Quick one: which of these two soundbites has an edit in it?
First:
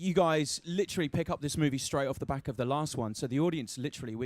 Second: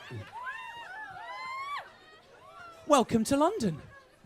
first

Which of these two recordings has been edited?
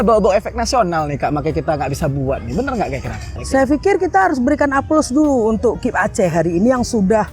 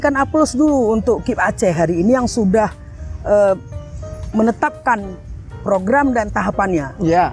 first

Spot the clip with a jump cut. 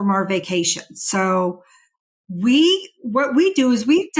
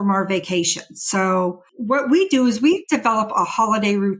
second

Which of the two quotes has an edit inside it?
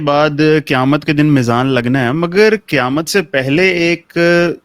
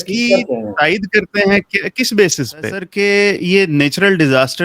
second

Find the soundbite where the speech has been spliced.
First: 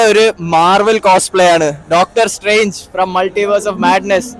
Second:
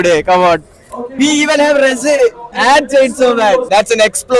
second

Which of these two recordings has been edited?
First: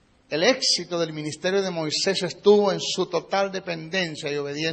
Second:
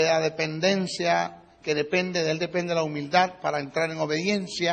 second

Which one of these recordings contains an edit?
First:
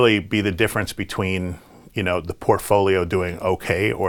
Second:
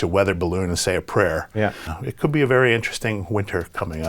second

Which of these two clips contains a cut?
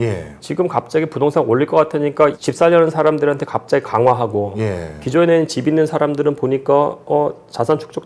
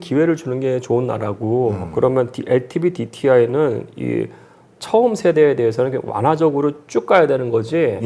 first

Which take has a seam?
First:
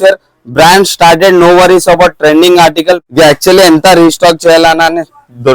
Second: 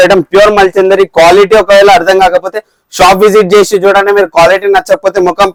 first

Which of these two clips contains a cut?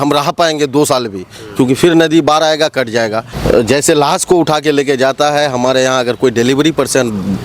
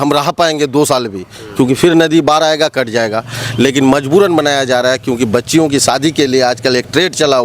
first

